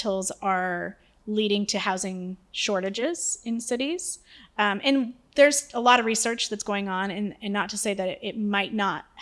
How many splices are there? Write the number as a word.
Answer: zero